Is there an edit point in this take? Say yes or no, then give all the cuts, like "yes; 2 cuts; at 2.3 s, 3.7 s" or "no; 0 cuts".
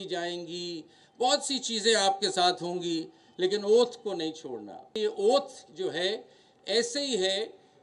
yes; 1 cut; at 4.9 s